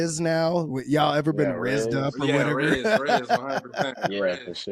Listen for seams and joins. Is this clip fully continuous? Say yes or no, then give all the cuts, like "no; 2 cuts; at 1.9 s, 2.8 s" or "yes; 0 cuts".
yes; 0 cuts